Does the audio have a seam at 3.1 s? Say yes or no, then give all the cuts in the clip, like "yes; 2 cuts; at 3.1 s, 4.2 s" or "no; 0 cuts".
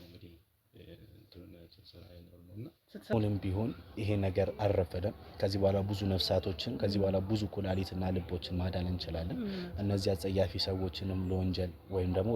yes; 1 cut; at 3.1 s